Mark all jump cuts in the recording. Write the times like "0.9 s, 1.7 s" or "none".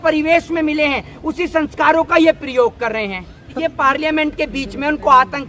3.5 s